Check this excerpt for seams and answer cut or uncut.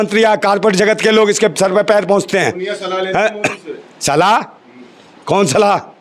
uncut